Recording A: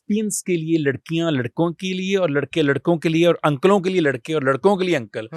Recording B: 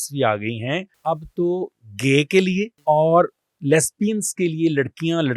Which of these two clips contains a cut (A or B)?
B